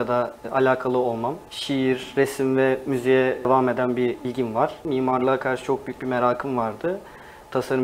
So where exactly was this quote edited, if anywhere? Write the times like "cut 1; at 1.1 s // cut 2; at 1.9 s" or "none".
cut 1; at 4.8 s